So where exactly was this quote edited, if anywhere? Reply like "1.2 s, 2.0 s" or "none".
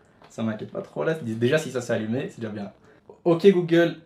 none